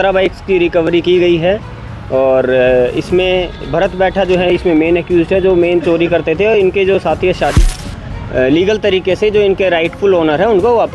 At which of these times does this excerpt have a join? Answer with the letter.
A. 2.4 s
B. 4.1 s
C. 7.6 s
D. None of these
C